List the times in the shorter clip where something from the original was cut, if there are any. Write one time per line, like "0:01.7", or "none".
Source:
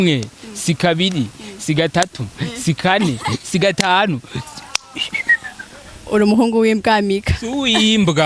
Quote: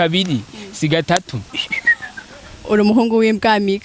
0:01.4